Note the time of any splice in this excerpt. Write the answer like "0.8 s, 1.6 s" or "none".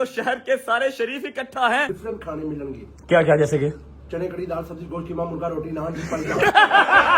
1.9 s